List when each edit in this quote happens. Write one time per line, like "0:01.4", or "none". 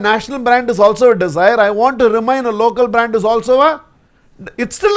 none